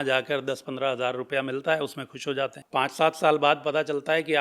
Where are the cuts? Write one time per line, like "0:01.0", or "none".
0:02.6